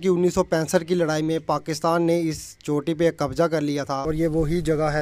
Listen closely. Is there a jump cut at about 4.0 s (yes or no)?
yes